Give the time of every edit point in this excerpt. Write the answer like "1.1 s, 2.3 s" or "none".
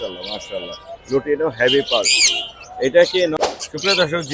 3.3 s